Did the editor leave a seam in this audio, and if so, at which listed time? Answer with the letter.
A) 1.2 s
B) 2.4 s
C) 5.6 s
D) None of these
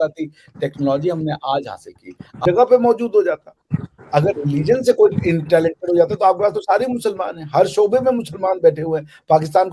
B